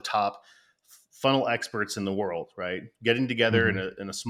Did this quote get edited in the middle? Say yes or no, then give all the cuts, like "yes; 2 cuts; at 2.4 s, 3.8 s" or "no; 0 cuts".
no; 0 cuts